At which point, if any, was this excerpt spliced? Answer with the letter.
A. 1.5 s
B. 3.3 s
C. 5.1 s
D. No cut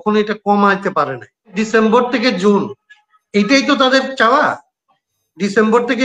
A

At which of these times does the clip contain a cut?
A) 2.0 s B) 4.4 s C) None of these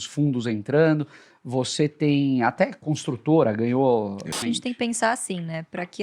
B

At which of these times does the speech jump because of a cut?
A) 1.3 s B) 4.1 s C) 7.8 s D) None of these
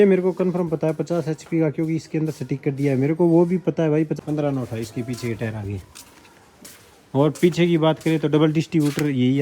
B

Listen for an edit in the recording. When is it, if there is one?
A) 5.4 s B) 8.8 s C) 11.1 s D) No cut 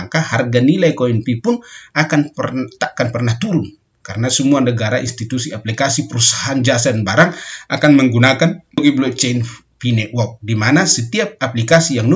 B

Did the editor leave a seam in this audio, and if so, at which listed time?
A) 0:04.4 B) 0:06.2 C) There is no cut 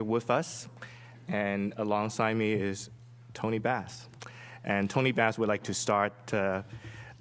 A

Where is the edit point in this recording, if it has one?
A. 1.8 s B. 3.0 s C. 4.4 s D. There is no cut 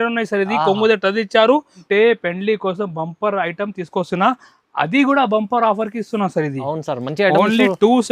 A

